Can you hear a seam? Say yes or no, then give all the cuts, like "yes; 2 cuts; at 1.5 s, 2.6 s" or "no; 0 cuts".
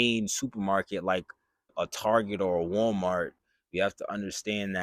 yes; 1 cut; at 3.4 s